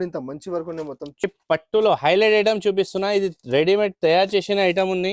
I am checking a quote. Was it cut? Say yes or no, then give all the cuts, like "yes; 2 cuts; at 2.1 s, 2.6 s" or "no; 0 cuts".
yes; 1 cut; at 1.2 s